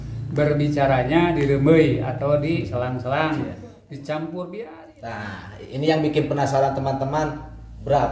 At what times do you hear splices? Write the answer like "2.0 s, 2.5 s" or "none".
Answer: 4.8 s